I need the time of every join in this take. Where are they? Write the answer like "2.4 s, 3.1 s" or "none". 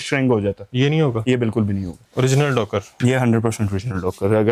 1.9 s